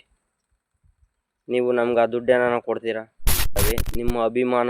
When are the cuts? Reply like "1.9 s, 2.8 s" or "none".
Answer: 3.6 s